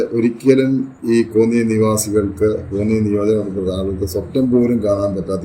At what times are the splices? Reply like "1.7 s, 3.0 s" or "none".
none